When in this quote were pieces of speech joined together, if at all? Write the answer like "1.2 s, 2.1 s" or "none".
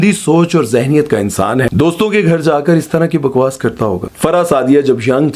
1.7 s, 4.1 s